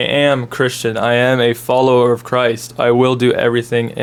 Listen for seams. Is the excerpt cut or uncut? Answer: uncut